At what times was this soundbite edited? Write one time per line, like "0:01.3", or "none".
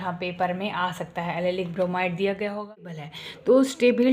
0:03.0